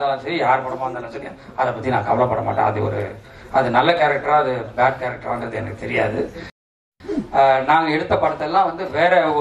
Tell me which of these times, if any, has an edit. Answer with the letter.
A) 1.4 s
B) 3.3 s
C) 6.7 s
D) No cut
C